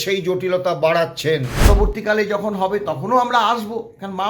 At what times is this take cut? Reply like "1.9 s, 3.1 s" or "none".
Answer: 1.7 s